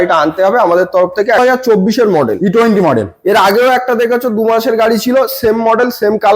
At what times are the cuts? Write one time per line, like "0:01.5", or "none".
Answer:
0:01.4